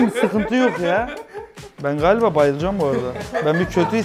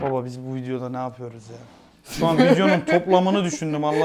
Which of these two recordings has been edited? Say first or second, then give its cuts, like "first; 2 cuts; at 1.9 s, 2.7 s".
first; 1 cut; at 1.7 s